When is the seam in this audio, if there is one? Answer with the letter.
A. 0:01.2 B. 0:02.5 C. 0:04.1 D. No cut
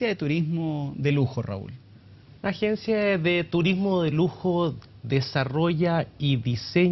D